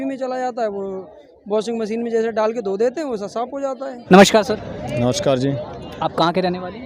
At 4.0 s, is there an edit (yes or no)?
no